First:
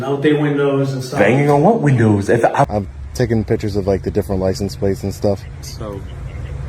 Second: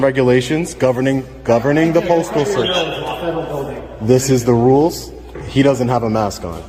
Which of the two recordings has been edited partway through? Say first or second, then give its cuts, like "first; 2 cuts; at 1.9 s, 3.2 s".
first; 1 cut; at 2.7 s